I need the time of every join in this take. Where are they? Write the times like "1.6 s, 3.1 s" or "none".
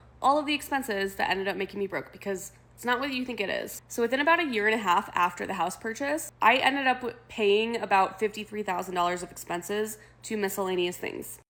none